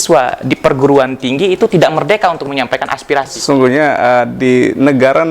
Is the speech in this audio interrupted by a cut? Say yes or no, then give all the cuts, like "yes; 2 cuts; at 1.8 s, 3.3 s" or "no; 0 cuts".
yes; 1 cut; at 3.3 s